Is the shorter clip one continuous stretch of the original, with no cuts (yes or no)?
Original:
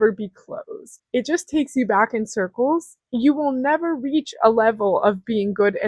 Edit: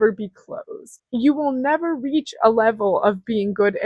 no